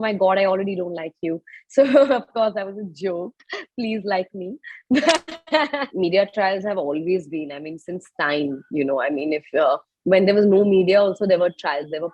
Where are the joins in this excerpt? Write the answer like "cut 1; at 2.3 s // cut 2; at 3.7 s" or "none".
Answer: cut 1; at 5.9 s